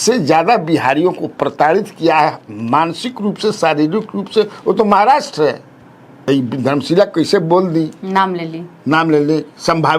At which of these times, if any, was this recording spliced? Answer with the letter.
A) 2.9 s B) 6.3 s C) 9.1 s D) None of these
B